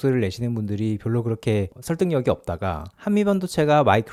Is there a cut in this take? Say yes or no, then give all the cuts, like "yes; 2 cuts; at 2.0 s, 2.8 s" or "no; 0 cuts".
no; 0 cuts